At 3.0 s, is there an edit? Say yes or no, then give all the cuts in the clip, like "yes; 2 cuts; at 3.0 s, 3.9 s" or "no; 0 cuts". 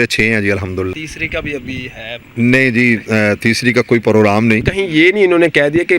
no; 2 cuts; at 1.0 s, 4.7 s